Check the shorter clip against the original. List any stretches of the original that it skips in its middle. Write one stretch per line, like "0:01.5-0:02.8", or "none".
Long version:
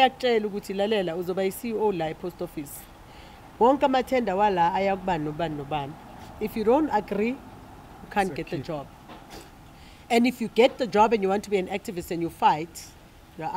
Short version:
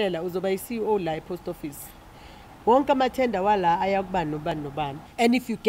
0:05.5-0:09.5